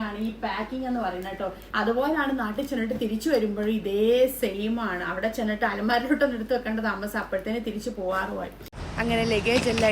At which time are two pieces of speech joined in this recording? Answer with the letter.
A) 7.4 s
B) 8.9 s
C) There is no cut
B